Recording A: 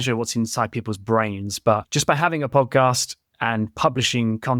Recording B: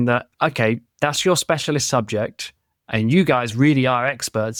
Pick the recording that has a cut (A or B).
A